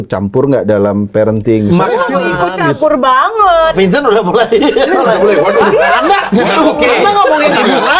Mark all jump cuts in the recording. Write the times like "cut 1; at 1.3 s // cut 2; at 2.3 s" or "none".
cut 1; at 3.7 s